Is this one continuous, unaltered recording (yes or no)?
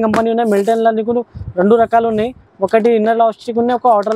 yes